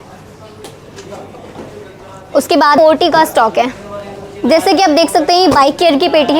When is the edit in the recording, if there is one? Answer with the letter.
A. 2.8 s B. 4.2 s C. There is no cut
A